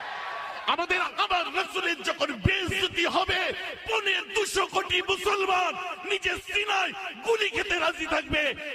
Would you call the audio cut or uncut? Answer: cut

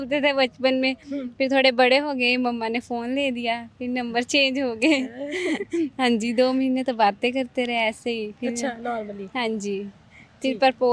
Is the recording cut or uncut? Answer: uncut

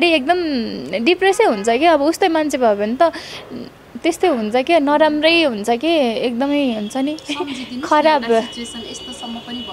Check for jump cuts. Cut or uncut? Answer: uncut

